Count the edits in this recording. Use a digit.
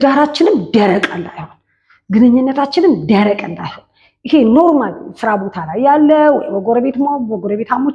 0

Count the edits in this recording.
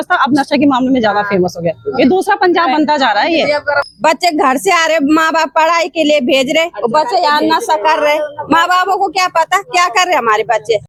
0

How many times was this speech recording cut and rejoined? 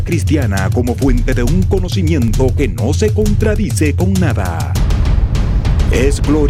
0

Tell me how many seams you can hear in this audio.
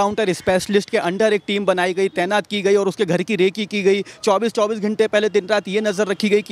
0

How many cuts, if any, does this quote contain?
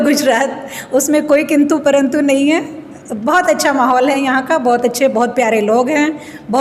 0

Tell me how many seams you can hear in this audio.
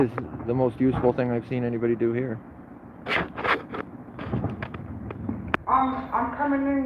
1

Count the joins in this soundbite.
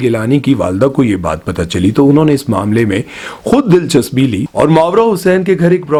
0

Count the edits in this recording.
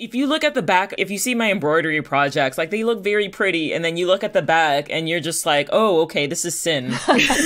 1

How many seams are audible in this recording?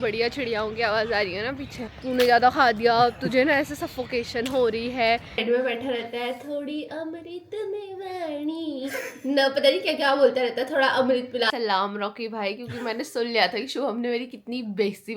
3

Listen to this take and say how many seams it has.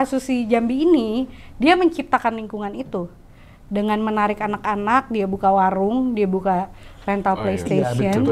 0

